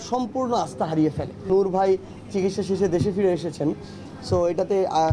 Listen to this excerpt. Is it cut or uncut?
cut